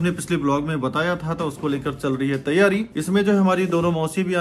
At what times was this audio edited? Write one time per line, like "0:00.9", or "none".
0:02.9